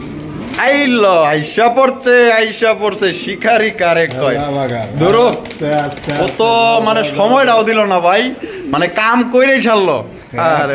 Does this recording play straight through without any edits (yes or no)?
yes